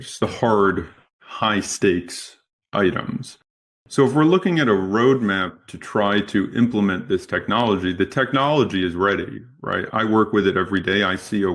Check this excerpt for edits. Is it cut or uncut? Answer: cut